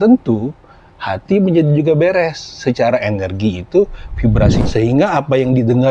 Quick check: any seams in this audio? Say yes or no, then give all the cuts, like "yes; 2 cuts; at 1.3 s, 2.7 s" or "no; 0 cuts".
yes; 1 cut; at 4.6 s